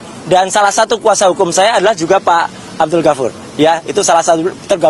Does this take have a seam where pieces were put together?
no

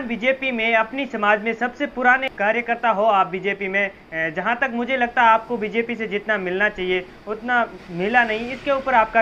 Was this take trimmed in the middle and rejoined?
no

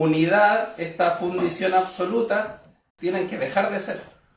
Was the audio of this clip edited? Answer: yes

